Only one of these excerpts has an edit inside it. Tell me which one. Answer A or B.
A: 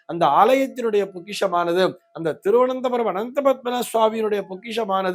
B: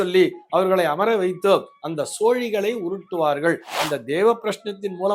B